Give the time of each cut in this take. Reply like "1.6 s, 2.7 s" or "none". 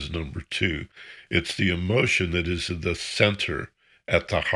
none